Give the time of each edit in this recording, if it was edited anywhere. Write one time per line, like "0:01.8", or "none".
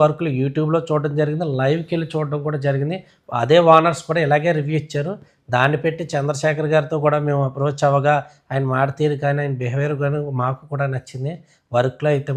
none

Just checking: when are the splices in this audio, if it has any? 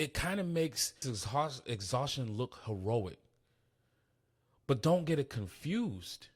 0:01.1

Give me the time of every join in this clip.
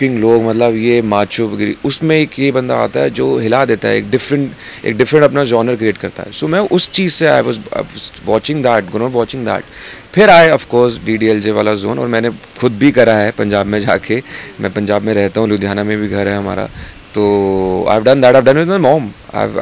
none

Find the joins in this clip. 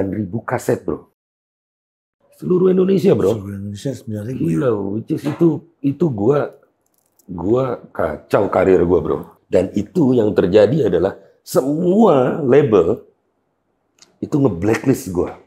0:09.3

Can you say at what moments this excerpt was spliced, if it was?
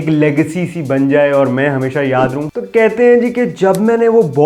0:02.5

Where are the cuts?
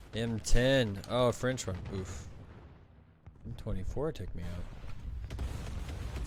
none

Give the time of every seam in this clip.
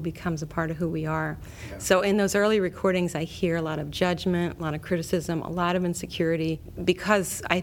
0:04.8
0:06.7

